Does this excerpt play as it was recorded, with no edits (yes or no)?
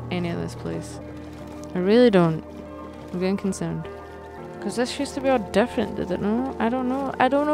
no